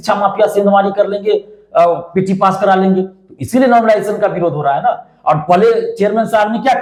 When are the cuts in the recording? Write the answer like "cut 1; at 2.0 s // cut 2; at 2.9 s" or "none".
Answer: none